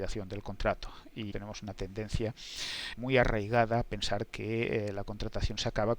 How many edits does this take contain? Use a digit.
1